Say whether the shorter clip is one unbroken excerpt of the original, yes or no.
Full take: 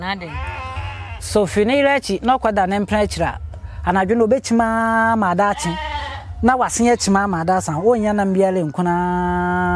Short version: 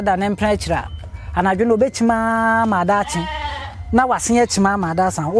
yes